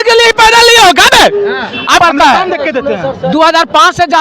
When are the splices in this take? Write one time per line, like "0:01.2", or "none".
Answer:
0:02.0